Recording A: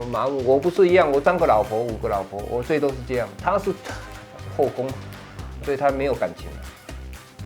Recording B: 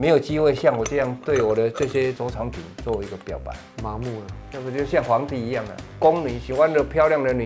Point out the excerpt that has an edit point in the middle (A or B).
A